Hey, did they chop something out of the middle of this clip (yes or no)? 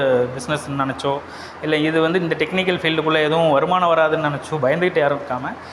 no